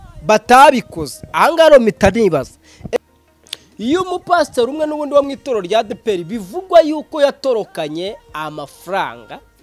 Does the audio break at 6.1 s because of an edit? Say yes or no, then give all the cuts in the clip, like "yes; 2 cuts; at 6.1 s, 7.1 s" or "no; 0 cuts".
no; 1 cut; at 3.0 s